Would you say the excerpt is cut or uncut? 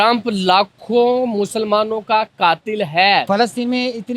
cut